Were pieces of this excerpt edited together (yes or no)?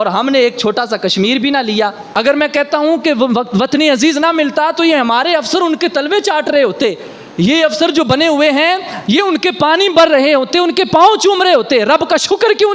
yes